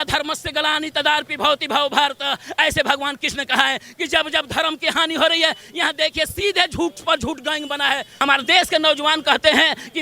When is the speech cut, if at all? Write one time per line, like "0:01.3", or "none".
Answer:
0:08.1